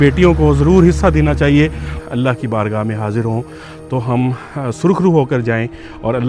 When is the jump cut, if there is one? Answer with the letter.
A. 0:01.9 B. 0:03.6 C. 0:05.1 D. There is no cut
A